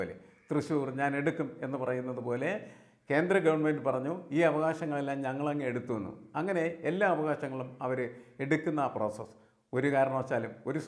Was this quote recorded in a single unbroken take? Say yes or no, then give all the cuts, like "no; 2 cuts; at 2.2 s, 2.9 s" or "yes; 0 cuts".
yes; 0 cuts